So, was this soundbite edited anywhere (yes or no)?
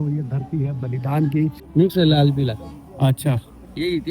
yes